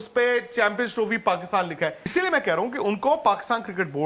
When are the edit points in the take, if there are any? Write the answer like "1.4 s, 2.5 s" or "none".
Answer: 2.1 s